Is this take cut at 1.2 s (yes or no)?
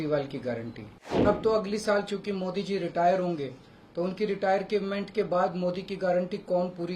yes